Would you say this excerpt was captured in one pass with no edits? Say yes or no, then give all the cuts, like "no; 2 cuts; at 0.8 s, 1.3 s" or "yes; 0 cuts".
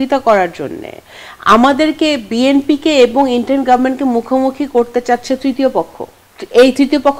yes; 0 cuts